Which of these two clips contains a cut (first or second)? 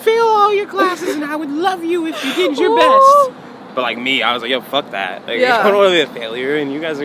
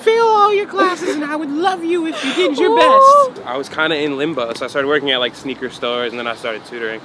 second